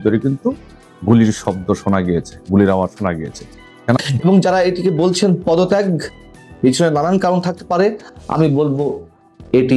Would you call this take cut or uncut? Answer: cut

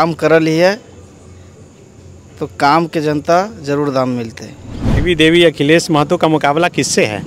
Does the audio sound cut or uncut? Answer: cut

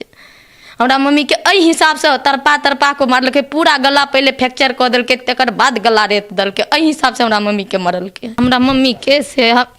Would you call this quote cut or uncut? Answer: cut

